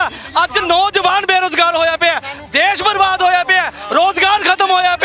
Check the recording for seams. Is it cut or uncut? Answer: uncut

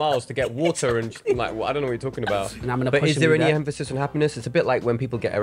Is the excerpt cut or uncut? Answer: cut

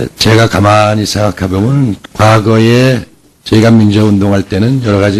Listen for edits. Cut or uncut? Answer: uncut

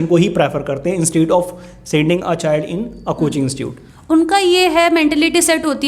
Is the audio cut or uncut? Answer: uncut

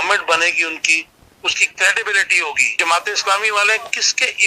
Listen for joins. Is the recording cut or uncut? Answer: cut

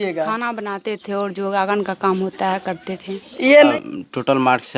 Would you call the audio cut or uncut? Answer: cut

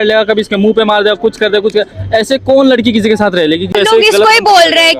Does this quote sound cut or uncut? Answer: cut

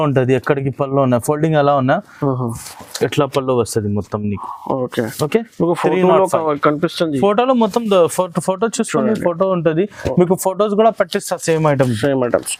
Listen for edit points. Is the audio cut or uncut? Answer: uncut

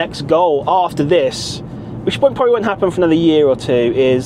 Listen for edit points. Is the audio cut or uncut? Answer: uncut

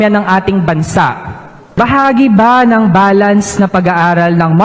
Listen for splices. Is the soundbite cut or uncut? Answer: cut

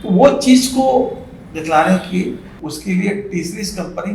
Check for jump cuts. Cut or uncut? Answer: cut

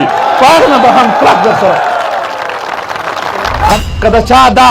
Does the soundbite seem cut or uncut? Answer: cut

